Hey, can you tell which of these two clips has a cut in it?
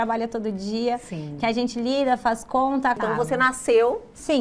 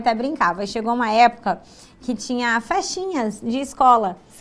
first; 1 cut; at 3.0 s

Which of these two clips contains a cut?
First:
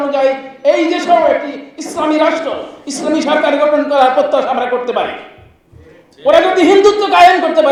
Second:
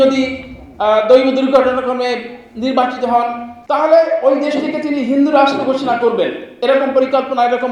second; 1 cut; at 3.5 s

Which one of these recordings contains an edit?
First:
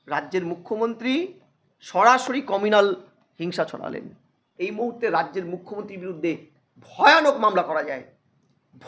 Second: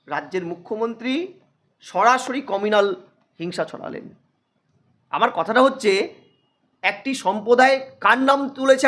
first; 1 cut; at 4.4 s

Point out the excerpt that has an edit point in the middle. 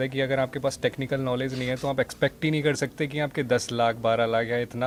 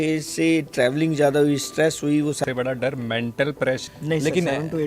second; 2 cuts; at 2.4 s, 3.8 s

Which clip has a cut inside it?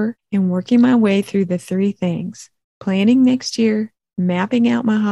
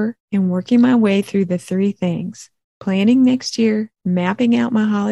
second; 1 cut; at 3.9 s

